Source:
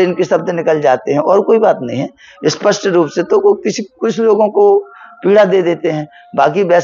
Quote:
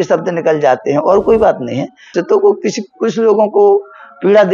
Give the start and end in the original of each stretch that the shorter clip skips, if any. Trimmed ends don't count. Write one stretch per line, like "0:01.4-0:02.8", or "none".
0:02.3-0:03.1